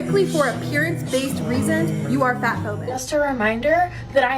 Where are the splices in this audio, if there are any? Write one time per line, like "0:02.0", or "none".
0:03.0